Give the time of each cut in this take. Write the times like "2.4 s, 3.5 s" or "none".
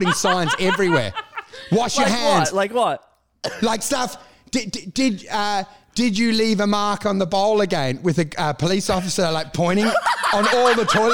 none